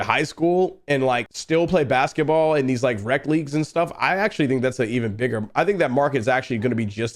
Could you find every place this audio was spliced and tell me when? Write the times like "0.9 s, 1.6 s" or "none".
1.3 s